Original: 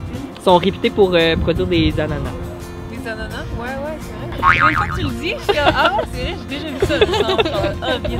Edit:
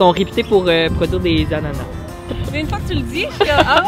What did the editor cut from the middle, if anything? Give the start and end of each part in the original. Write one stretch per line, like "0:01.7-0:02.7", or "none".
0:03.1-0:04.7